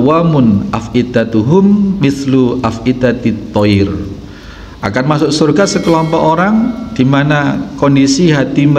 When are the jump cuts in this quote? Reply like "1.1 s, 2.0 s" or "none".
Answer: 4.0 s